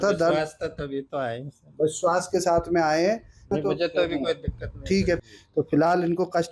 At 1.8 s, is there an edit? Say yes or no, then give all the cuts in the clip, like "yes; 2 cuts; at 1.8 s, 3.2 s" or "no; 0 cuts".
no; 2 cuts; at 3.5 s, 5.2 s